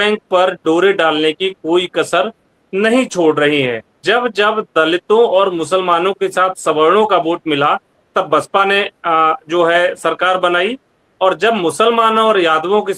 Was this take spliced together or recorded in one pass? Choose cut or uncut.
cut